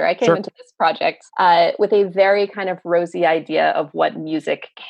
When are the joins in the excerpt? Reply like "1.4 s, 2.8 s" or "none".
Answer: 1.2 s